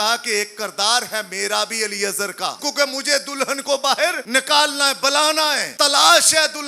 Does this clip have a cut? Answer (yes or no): yes